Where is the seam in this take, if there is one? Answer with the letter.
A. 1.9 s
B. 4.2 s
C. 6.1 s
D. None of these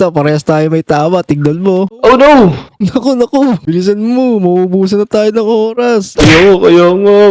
A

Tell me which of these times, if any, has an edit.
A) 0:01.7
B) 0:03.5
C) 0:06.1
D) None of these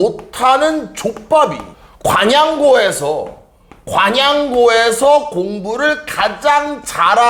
D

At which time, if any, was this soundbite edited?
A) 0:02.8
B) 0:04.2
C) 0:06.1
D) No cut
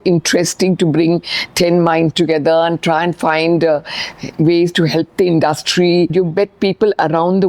C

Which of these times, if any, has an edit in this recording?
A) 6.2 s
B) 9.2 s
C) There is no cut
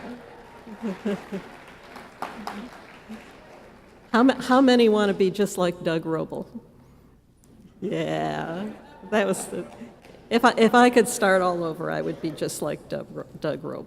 A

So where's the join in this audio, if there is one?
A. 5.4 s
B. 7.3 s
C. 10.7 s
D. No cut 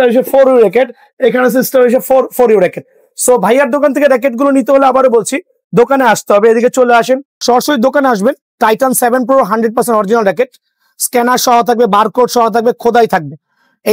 B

